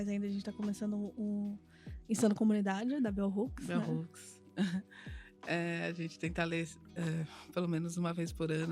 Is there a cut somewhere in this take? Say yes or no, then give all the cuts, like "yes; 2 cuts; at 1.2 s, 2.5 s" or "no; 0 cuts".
no; 0 cuts